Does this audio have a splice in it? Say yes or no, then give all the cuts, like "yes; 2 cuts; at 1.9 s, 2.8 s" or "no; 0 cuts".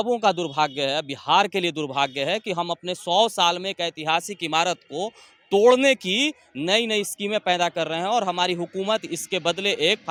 no; 0 cuts